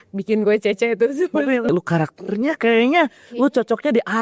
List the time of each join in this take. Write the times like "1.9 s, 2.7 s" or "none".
1.7 s